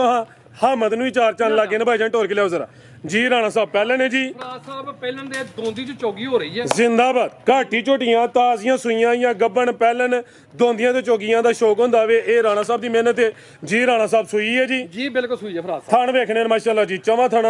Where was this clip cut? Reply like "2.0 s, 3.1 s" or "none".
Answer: none